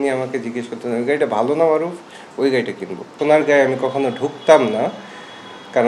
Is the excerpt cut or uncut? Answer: cut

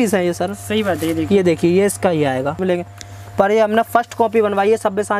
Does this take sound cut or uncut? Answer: cut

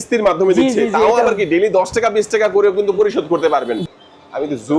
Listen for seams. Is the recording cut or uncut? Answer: cut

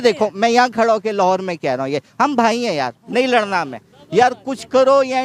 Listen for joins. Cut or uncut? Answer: uncut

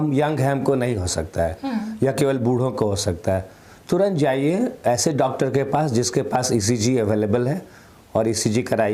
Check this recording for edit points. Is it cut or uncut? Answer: uncut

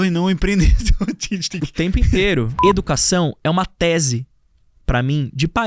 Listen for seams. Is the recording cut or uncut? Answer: cut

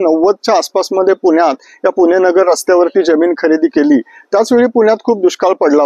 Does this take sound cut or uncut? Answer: uncut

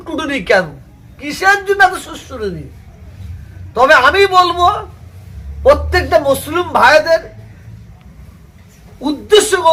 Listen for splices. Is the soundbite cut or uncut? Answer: uncut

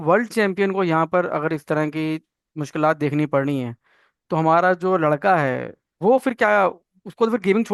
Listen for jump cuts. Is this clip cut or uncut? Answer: uncut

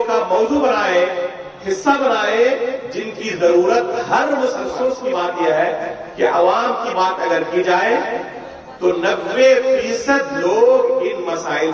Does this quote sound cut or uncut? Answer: cut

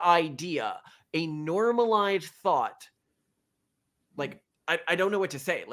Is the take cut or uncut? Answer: uncut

